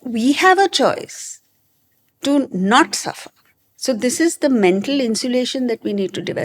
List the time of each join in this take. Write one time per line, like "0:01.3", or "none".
none